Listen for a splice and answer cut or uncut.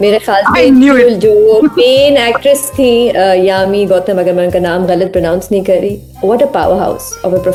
uncut